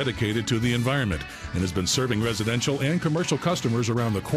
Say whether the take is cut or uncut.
uncut